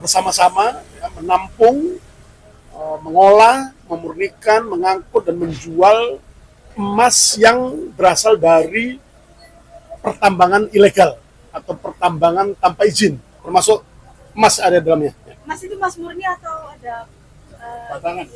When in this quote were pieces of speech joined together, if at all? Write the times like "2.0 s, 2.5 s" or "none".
13.3 s